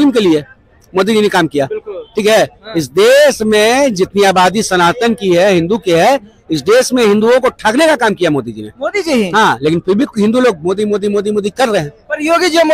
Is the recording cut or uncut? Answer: uncut